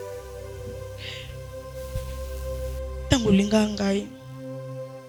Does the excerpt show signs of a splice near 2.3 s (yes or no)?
no